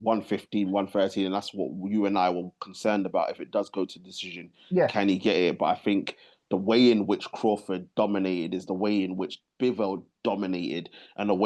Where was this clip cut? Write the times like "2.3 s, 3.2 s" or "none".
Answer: none